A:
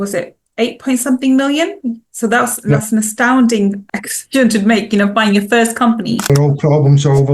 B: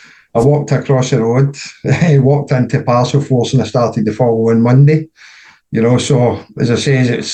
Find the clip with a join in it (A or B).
A